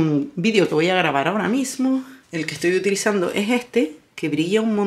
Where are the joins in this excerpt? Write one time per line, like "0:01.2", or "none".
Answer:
0:02.2